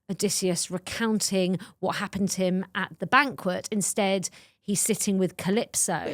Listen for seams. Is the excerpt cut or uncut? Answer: uncut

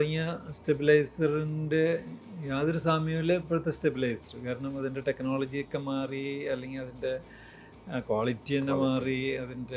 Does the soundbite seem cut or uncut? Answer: uncut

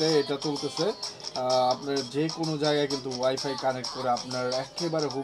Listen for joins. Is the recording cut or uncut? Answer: uncut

